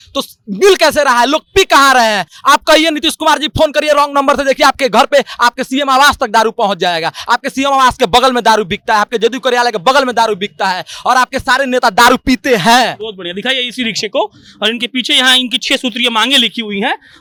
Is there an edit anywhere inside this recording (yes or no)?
no